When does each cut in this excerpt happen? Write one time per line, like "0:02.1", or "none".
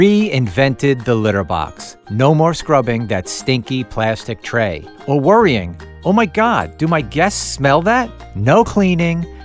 0:08.2